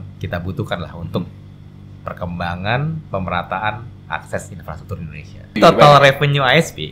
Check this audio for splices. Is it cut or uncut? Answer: cut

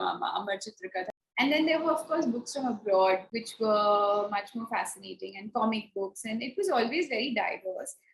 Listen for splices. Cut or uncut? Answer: cut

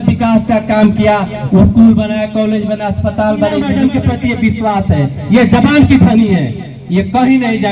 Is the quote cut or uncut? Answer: cut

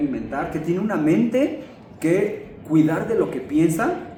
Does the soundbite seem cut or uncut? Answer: uncut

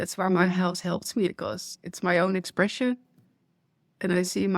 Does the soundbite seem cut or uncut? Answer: cut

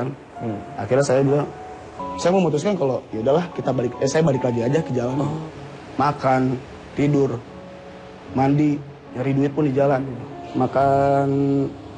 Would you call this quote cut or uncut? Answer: cut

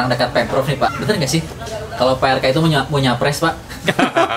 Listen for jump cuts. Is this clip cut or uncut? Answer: uncut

